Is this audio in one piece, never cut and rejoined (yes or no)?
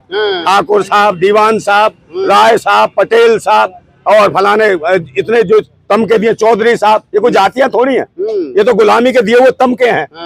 yes